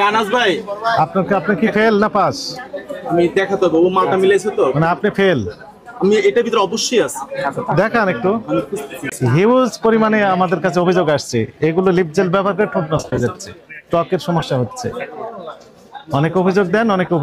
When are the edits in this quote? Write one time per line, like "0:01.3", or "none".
0:09.1